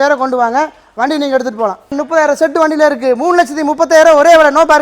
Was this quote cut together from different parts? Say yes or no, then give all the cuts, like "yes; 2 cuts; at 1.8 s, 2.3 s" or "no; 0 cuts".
yes; 1 cut; at 2.0 s